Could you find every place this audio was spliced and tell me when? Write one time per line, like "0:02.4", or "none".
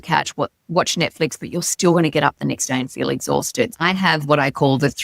0:03.7